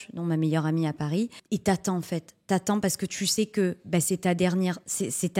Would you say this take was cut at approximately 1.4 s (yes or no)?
yes